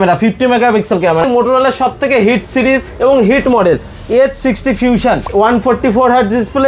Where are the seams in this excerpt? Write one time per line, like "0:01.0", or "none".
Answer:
0:01.2
0:05.3